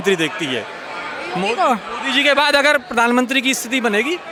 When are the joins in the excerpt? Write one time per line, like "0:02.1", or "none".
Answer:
none